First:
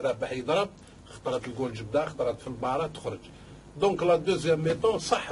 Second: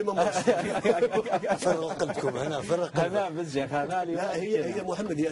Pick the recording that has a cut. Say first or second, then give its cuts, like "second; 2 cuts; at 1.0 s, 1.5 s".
first; 1 cut; at 3.7 s